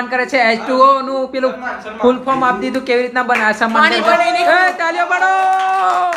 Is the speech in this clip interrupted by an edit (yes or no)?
no